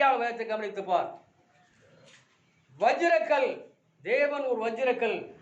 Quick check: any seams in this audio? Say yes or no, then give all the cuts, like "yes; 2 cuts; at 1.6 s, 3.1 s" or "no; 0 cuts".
no; 0 cuts